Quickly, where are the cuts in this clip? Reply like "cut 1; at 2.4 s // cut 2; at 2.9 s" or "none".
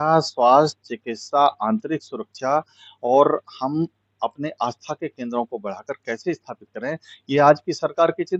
none